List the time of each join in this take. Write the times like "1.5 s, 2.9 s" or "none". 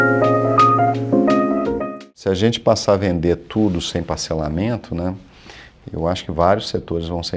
2.1 s